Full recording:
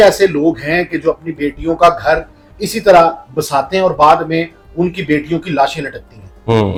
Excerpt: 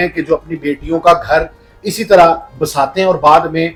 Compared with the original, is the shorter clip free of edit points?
yes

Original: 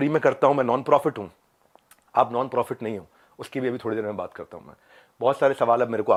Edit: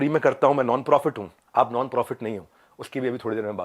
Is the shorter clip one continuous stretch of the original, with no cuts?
no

